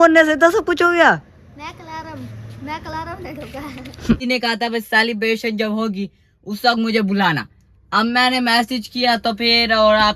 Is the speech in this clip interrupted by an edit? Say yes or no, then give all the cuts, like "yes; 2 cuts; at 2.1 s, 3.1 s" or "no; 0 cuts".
yes; 1 cut; at 4.2 s